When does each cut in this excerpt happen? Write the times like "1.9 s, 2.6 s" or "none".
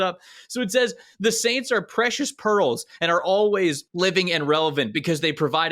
3.9 s